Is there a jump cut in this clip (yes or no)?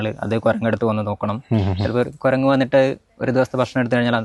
no